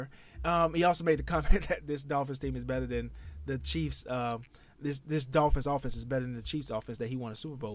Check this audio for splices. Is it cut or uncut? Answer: uncut